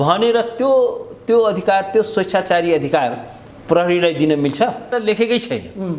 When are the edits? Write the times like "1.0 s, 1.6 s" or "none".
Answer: 4.9 s